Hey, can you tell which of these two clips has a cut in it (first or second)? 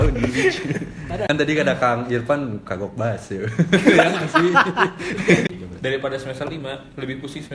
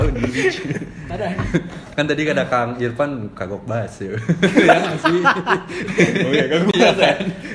first